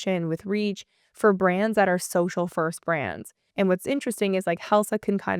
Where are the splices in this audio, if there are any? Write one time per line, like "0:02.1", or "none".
0:03.4